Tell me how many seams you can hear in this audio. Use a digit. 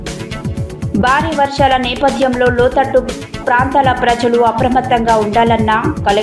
0